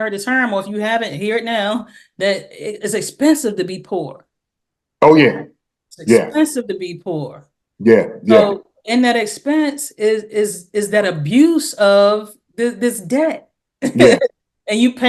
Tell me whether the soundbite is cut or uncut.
uncut